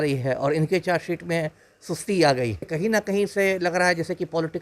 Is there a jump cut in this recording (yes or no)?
yes